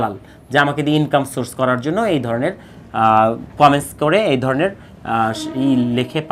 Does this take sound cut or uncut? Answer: uncut